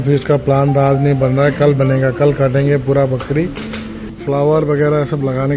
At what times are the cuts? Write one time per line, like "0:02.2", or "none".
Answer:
0:04.2